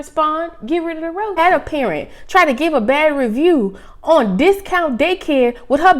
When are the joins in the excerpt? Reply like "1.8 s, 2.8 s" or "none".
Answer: 1.3 s